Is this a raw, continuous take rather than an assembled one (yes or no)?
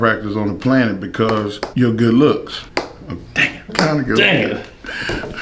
no